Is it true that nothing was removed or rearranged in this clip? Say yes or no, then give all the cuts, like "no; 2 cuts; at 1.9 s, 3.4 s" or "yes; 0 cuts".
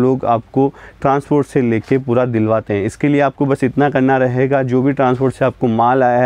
yes; 0 cuts